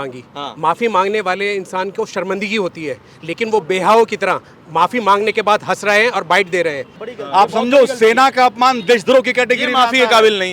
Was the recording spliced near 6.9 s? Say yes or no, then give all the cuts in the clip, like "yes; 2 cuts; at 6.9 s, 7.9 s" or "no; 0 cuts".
yes; 1 cut; at 6.9 s